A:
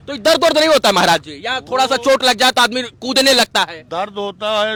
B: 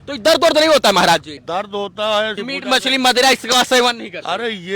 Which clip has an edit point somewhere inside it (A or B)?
B